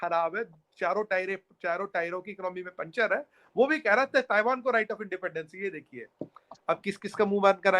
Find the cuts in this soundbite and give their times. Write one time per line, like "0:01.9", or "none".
none